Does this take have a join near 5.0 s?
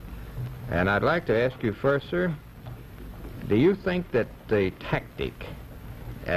yes; 1 cut; at 5.0 s

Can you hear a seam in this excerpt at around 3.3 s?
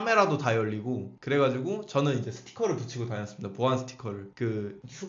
no; 0 cuts

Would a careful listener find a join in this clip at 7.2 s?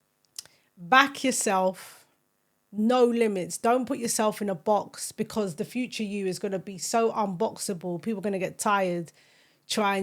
no; 0 cuts

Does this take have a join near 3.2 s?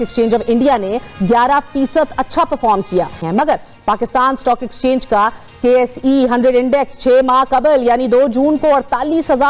no; 0 cuts

